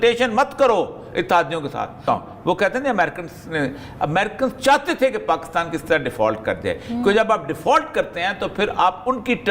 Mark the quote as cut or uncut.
cut